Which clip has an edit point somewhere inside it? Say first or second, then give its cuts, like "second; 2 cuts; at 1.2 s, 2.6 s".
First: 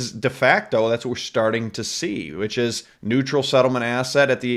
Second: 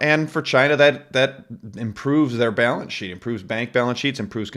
first; 1 cut; at 2.9 s